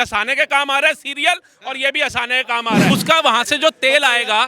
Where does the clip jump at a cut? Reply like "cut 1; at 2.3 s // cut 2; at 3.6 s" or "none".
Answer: cut 1; at 2.9 s

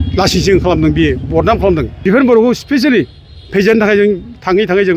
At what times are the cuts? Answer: cut 1; at 1.9 s

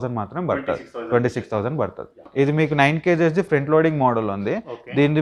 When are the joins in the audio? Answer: cut 1; at 2.2 s

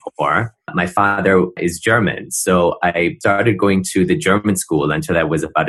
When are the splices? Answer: cut 1; at 1.5 s // cut 2; at 3.2 s

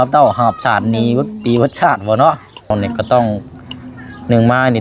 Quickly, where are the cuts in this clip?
cut 1; at 2.7 s

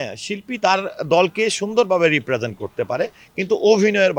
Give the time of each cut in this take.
none

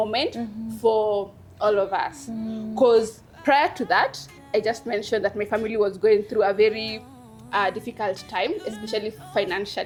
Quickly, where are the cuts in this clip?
none

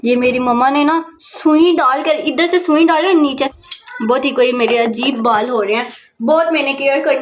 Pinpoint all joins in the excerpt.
cut 1; at 3.5 s

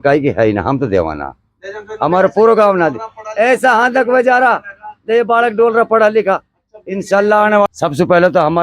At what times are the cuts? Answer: cut 1; at 7.7 s

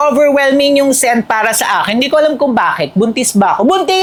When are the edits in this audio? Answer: none

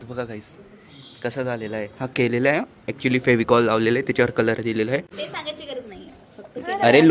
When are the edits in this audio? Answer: none

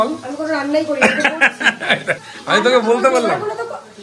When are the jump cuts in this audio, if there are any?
cut 1; at 2.3 s

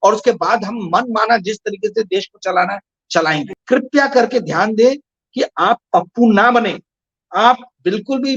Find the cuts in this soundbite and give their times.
cut 1; at 3.5 s

